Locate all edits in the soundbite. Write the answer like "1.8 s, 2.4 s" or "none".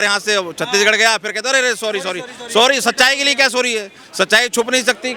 none